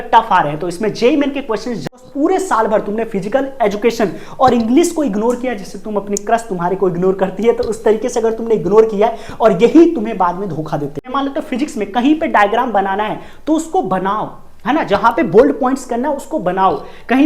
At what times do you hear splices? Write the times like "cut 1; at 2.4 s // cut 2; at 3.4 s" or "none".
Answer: cut 1; at 1.8 s // cut 2; at 11.1 s